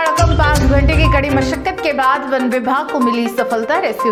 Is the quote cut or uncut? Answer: uncut